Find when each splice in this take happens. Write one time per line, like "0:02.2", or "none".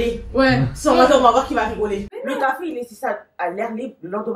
0:02.1